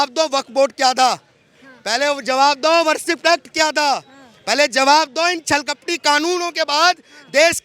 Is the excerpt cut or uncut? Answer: uncut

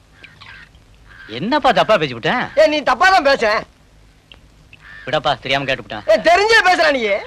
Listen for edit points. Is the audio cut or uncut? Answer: uncut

